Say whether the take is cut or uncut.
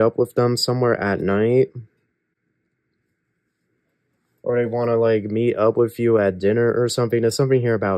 uncut